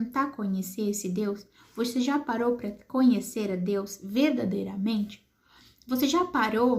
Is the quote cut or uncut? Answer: uncut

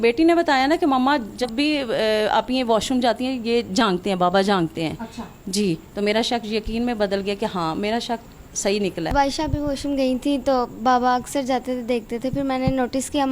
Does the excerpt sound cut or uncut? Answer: cut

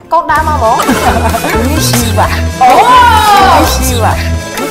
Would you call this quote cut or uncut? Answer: uncut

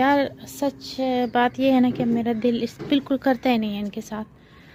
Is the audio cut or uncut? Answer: uncut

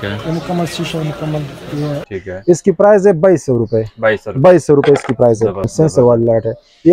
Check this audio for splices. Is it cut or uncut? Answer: cut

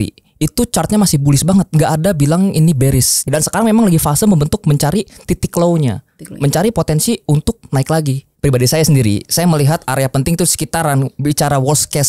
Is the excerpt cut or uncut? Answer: cut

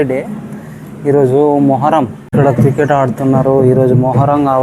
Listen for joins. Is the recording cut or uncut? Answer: cut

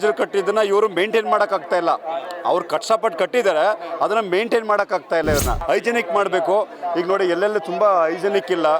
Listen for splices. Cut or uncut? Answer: cut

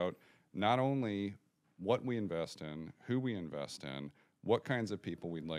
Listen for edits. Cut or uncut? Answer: uncut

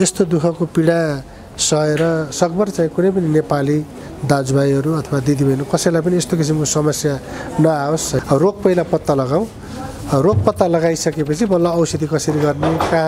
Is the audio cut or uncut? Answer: cut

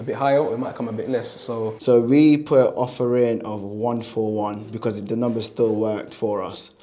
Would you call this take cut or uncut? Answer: cut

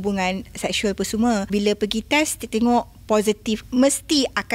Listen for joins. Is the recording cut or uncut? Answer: cut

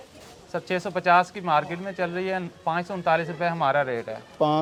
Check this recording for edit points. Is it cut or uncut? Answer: uncut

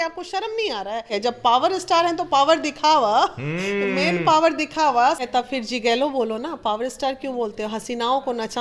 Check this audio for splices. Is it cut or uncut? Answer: cut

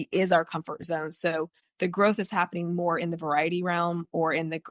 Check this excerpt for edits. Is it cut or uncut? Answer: cut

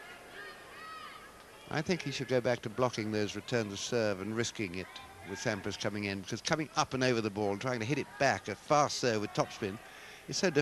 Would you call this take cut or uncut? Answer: cut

